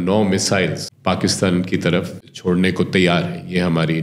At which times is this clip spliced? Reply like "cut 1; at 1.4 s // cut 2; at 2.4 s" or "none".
cut 1; at 0.9 s // cut 2; at 2.2 s